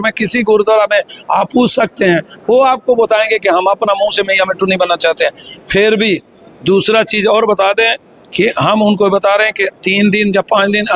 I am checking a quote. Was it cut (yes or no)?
no